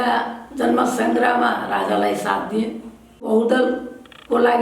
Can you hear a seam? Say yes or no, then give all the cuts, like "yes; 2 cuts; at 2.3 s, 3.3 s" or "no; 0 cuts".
yes; 1 cut; at 3.2 s